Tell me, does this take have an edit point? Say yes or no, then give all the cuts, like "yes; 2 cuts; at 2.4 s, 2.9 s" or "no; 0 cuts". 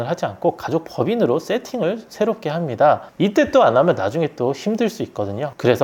no; 0 cuts